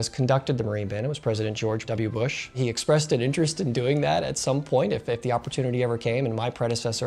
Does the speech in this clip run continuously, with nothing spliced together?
no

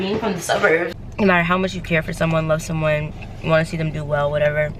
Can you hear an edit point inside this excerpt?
yes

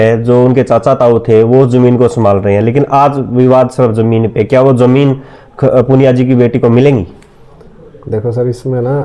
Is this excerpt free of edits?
yes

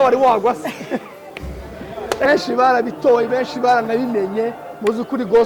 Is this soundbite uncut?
no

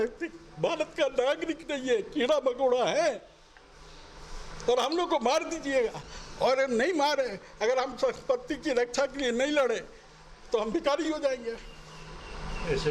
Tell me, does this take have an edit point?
no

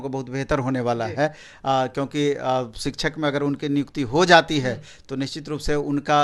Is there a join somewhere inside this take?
no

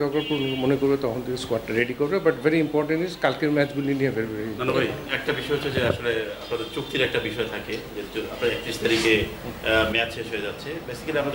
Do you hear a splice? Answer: no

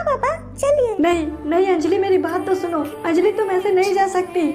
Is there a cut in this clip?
yes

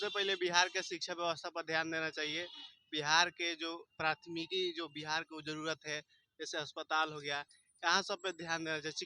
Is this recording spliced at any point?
no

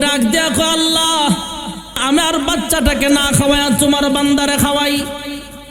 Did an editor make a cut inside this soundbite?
yes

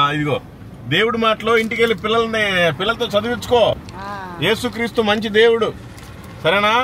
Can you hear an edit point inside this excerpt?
no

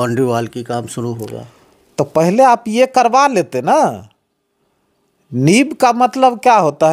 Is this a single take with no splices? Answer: yes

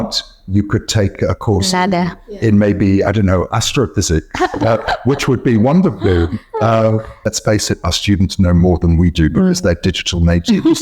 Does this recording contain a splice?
yes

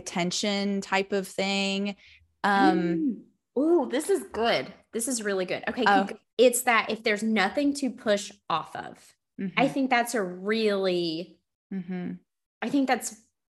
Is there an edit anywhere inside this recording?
yes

